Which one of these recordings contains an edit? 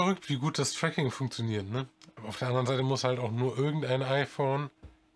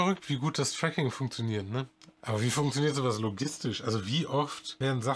second; 1 cut; at 2.2 s

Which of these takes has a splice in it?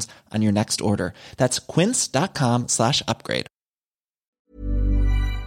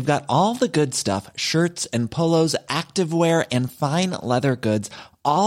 first; 1 cut; at 4.3 s

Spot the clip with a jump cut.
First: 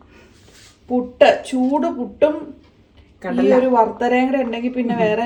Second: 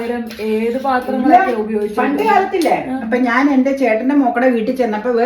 second; 1 cut; at 3.0 s

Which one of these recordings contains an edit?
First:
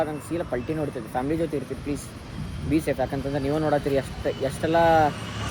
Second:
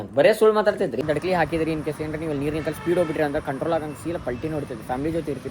second; 1 cut; at 1.0 s

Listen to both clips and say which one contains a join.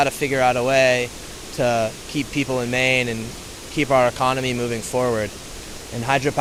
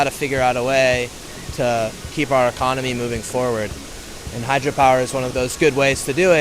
second; 2 cuts; at 2.0 s, 5.3 s

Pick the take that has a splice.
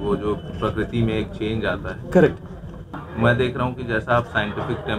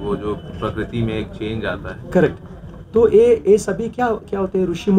first; 1 cut; at 2.9 s

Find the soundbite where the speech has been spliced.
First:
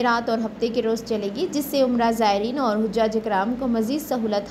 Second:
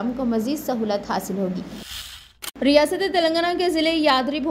second; 1 cut; at 2.0 s

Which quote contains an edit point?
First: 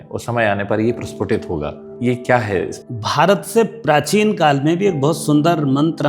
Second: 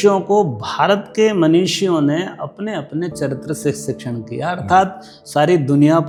first; 2 cuts; at 1.9 s, 2.8 s

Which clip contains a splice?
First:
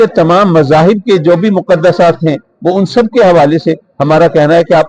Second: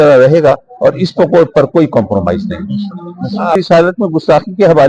second; 1 cut; at 3.6 s

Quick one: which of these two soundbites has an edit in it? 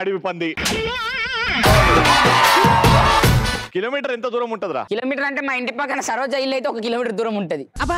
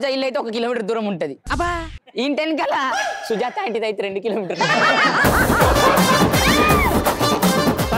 first; 2 cuts; at 3.6 s, 4.9 s

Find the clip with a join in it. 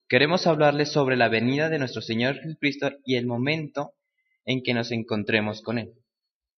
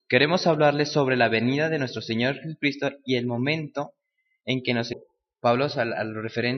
first; 1 cut; at 4.9 s

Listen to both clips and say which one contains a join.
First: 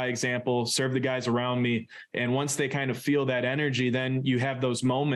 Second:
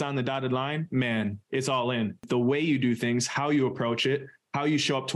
second; 1 cut; at 2.2 s

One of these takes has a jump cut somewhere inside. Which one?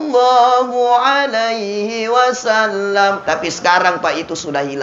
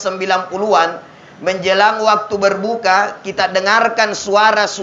first; 1 cut; at 3.2 s

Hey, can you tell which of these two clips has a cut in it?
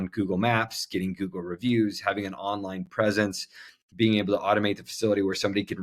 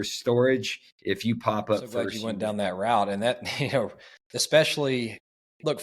second; 1 cut; at 2.2 s

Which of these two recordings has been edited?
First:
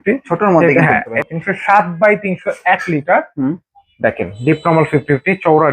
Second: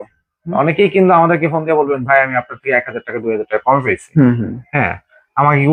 first; 1 cut; at 1.2 s

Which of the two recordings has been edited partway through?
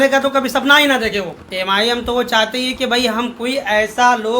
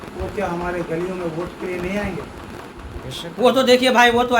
first; 1 cut; at 1.4 s

